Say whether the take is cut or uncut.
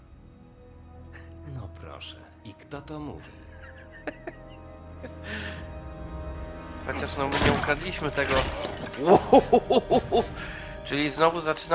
uncut